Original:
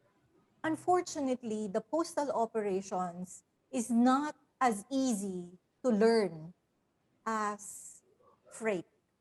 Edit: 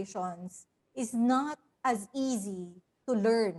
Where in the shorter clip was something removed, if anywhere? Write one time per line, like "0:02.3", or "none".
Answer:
none